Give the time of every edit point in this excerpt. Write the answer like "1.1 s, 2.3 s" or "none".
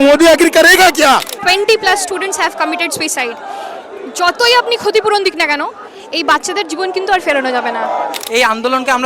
1.3 s, 8.2 s